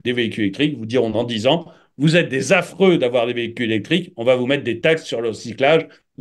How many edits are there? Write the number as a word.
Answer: zero